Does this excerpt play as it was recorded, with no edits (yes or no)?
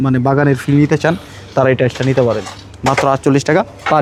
yes